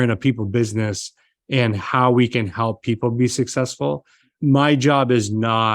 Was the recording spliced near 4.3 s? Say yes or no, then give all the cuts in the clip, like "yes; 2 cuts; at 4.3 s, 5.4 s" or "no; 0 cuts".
yes; 1 cut; at 4.3 s